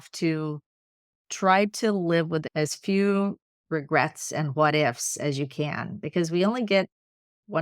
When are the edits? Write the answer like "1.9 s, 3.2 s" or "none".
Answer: 2.5 s